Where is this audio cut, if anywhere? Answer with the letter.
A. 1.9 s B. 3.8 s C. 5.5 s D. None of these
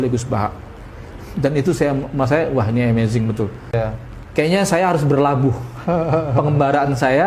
B